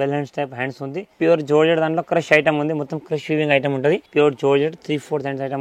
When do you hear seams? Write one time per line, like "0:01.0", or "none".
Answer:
0:01.1
0:04.1